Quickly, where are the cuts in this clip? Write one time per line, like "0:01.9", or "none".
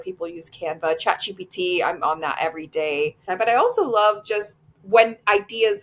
0:03.3